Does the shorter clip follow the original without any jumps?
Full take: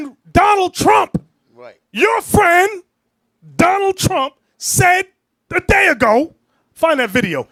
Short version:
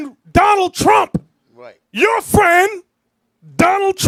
yes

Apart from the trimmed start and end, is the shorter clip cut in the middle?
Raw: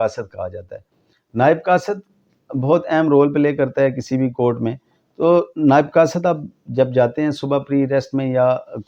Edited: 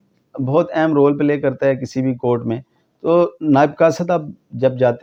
no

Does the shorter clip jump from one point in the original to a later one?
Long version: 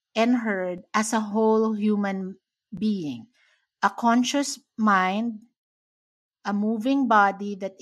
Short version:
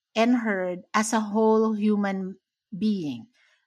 no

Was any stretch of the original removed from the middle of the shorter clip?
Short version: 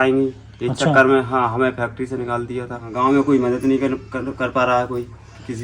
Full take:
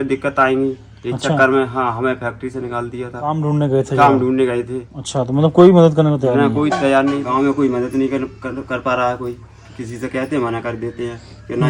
yes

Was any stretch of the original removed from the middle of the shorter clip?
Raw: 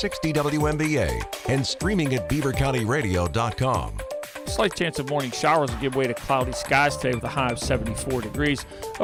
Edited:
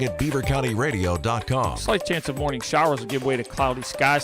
yes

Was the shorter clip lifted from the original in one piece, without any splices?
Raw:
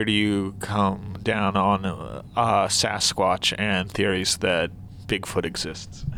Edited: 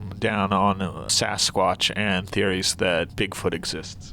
no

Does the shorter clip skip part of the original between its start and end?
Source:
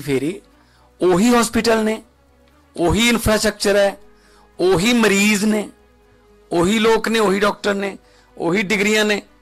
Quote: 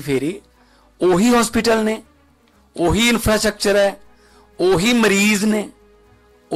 no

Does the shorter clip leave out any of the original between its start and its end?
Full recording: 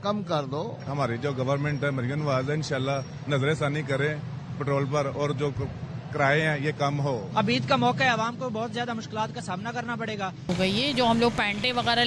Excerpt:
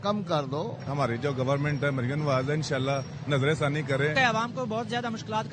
yes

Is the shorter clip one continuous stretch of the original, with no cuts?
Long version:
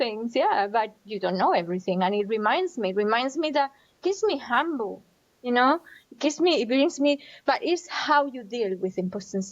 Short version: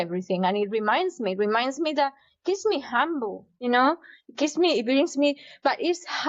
no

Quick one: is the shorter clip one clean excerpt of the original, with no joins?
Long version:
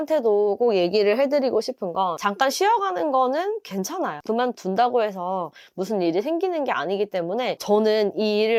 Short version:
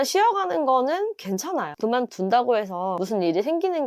no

